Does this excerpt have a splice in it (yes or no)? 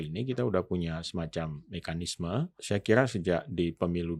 yes